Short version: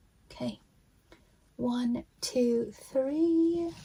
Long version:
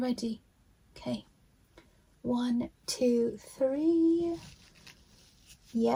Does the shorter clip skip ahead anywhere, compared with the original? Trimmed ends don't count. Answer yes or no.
no